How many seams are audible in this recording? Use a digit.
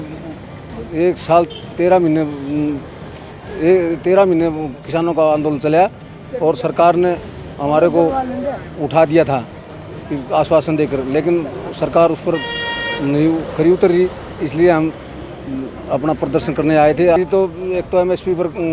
1